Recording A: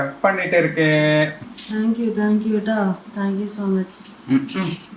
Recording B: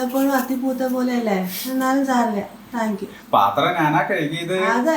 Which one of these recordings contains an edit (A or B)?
A